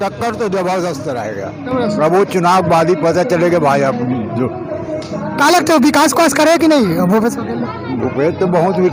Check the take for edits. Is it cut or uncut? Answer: uncut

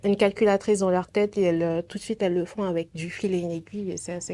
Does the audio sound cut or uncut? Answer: uncut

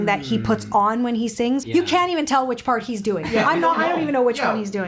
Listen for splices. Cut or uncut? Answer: cut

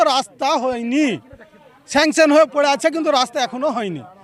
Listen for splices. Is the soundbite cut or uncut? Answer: uncut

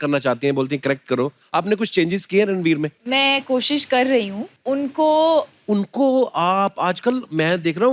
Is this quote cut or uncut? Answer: cut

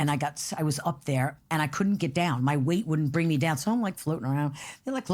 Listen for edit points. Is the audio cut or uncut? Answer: uncut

